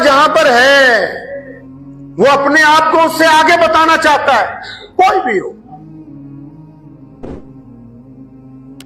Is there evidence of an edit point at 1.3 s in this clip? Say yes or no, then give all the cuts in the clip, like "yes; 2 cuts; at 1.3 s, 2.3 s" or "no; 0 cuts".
no; 0 cuts